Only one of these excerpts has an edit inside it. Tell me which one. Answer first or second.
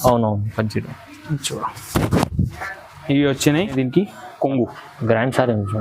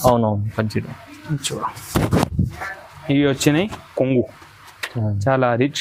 first